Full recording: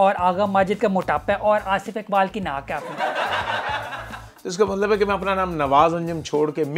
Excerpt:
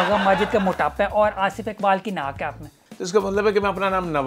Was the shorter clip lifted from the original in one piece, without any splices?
no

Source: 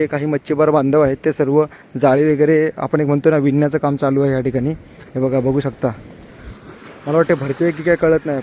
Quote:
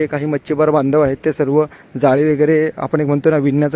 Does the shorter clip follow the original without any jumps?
yes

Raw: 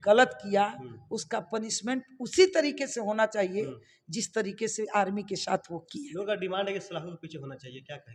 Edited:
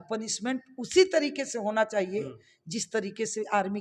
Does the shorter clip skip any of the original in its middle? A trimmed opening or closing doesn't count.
no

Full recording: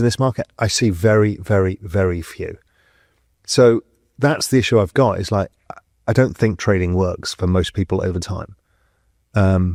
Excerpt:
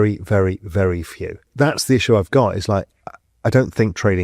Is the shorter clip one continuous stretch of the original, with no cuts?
no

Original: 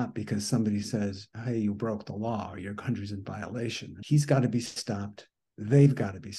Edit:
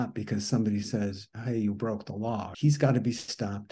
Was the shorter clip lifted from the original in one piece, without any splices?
no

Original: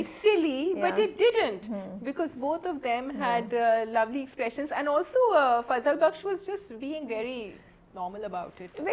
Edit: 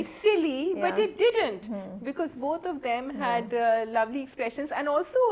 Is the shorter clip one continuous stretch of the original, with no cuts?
yes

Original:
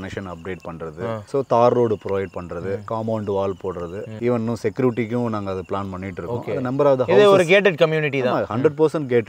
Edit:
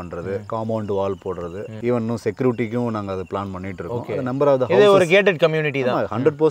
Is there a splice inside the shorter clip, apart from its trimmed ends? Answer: no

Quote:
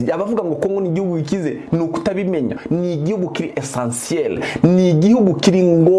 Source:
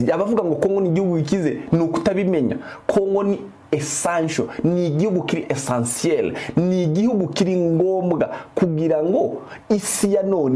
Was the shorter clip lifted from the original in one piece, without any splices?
no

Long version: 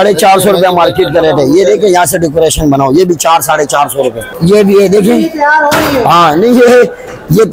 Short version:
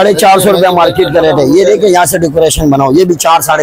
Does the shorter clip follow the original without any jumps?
yes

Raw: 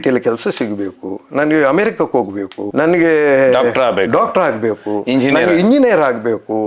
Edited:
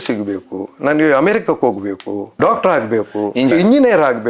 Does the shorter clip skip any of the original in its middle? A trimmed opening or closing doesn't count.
yes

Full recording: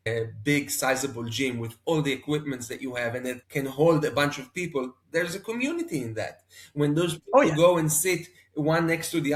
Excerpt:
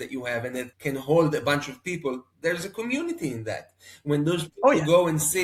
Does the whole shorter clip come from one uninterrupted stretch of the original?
yes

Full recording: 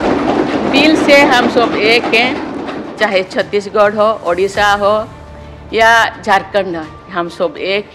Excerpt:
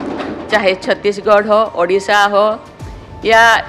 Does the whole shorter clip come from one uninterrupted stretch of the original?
yes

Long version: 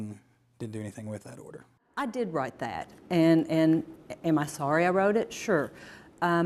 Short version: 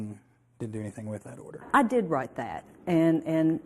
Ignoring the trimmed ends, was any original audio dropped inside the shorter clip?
yes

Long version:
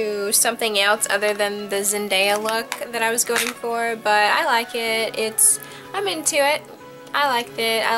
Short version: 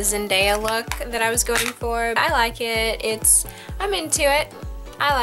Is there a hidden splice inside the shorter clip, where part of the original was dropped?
yes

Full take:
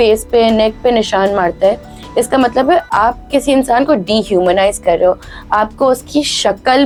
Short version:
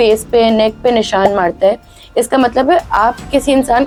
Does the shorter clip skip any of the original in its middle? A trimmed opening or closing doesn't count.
no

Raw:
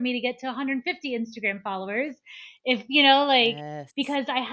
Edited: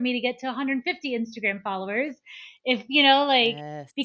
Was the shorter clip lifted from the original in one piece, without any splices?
yes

